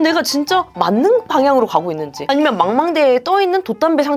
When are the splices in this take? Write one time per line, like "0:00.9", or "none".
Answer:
0:02.2